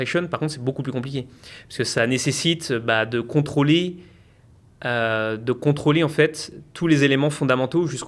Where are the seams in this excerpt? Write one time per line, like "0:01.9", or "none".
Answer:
none